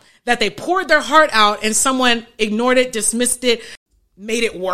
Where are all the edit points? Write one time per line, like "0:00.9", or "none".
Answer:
0:03.8